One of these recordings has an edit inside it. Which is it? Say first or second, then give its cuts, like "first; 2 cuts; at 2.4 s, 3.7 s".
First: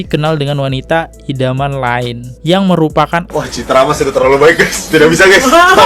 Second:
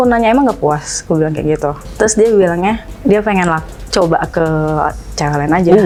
first; 1 cut; at 3.4 s